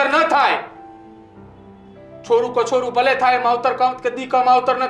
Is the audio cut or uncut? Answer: uncut